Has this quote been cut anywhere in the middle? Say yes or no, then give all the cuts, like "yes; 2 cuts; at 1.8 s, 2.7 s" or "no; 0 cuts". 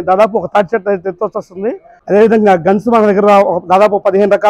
yes; 1 cut; at 1.9 s